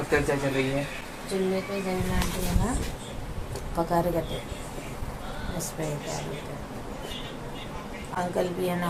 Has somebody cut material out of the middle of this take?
no; 0 cuts

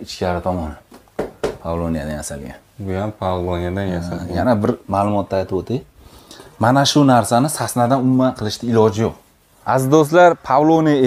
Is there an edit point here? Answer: yes; 1 cut; at 9.5 s

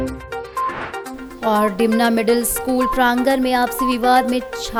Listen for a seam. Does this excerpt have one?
no; 0 cuts

